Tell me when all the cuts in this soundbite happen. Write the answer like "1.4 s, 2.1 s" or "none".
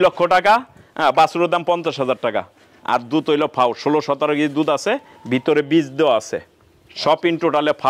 none